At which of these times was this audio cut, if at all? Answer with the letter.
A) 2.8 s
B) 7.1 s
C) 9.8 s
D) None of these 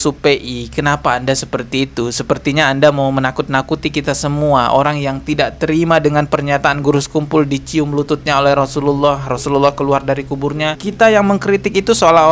D